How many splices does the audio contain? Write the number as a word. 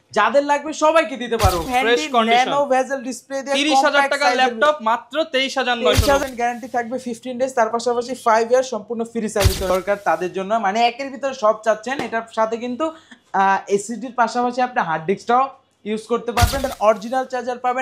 four